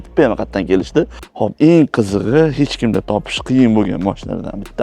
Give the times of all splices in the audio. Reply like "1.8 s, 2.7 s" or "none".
1.2 s